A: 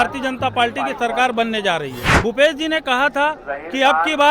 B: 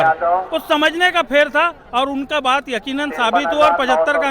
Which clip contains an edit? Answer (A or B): A